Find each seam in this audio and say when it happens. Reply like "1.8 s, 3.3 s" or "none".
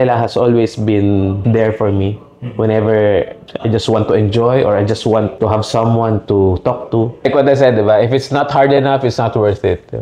1.4 s, 5.3 s, 7.3 s